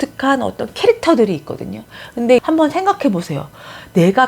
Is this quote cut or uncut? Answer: cut